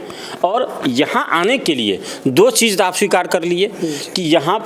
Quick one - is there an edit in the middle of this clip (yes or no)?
no